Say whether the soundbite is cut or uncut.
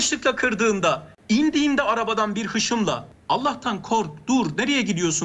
cut